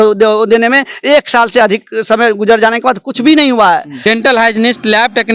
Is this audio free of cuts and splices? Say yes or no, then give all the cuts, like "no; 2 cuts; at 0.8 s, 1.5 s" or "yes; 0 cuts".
no; 1 cut; at 3.9 s